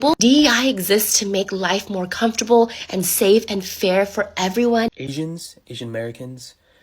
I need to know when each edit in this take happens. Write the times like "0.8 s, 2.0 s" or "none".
4.9 s